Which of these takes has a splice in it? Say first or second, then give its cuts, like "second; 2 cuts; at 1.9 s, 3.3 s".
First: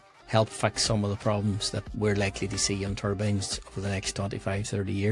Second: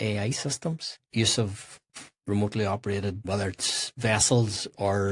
second; 3 cuts; at 1.0 s, 1.9 s, 3.2 s